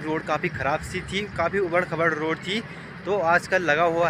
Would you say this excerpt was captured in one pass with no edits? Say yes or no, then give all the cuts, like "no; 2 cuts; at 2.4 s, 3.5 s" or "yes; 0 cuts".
yes; 0 cuts